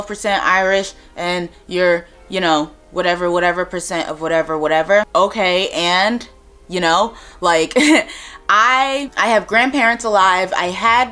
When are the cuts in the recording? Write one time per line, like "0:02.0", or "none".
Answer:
none